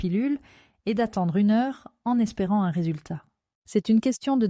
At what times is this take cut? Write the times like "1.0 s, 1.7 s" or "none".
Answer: 3.5 s